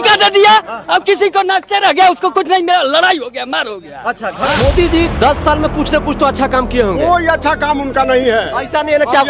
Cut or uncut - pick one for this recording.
cut